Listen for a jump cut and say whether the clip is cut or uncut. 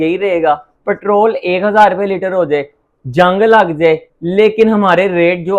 uncut